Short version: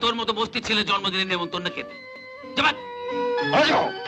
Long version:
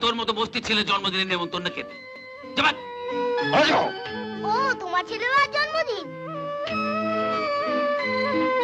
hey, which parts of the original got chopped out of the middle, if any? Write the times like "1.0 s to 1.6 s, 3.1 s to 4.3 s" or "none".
none

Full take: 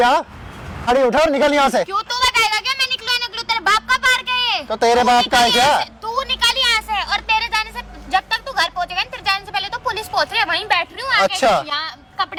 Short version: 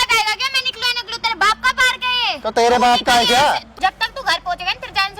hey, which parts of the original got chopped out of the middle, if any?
5.9 s to 8.0 s

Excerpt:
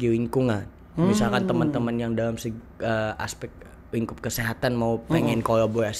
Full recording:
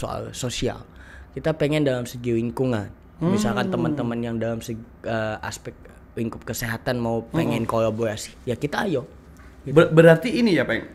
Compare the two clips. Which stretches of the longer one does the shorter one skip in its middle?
none

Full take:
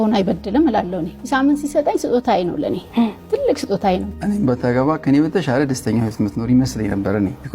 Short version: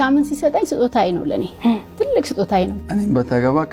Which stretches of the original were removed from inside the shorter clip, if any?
none

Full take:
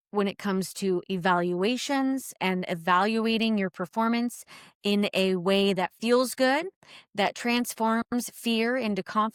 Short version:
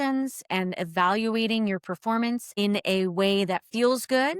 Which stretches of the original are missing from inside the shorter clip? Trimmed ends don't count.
4.4 s to 4.8 s

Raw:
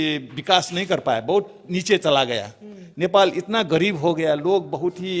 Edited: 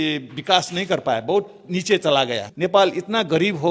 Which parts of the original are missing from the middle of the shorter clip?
2.4 s to 2.8 s

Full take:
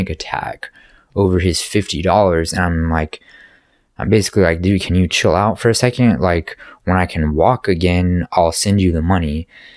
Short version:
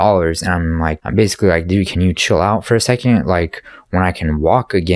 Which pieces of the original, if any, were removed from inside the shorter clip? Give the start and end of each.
3.1 s to 4.0 s

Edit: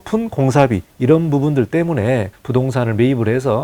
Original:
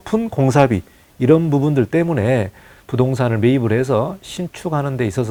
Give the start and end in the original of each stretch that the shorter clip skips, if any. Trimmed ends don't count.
0.9 s to 1.1 s, 2.6 s to 2.8 s

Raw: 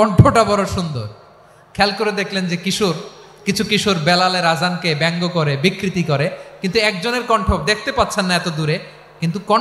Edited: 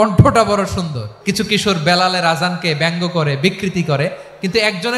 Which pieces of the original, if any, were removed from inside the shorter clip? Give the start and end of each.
1.0 s to 3.2 s

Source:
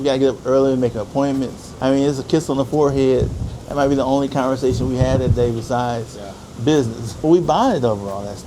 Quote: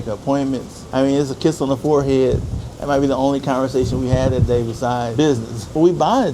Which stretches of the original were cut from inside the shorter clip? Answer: 6.0 s to 6.6 s

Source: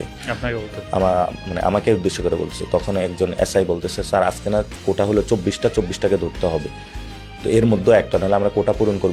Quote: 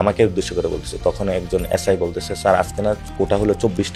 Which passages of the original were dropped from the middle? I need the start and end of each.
none

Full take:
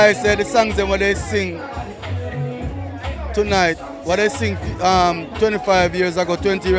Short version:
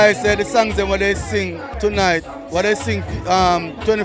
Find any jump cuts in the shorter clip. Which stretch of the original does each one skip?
1.7 s to 3.2 s

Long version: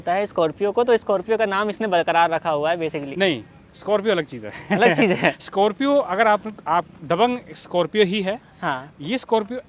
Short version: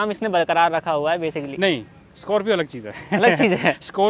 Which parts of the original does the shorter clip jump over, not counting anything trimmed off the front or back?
none

